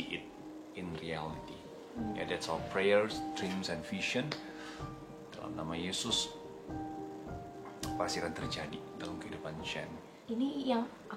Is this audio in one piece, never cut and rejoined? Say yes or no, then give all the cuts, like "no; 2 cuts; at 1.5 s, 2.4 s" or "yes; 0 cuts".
no; 1 cut; at 10.1 s